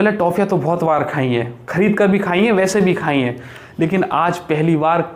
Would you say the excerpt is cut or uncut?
uncut